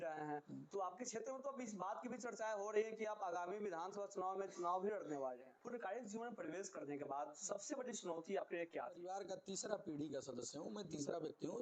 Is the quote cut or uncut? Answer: cut